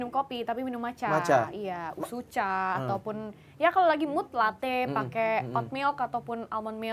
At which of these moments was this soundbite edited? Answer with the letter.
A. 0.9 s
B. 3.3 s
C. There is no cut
C